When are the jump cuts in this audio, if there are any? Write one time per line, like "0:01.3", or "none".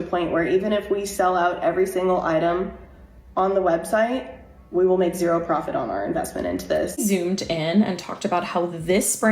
0:07.0